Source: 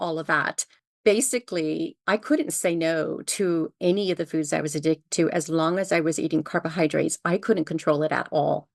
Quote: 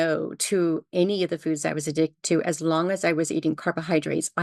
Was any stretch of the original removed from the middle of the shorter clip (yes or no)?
no